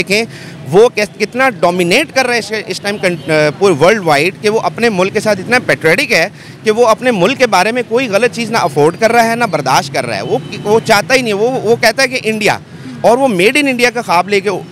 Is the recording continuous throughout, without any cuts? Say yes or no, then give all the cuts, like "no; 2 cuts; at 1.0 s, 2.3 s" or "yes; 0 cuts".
yes; 0 cuts